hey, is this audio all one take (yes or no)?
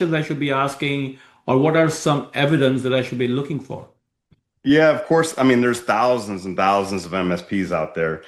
yes